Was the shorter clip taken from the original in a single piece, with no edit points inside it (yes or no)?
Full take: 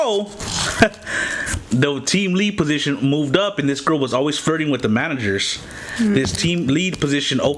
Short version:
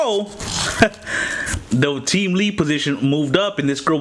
yes